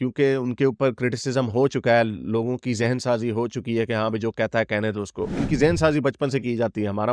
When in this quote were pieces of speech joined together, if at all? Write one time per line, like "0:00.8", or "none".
0:05.4